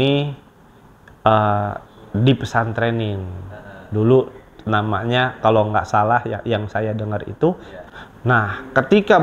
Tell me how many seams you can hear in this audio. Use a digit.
1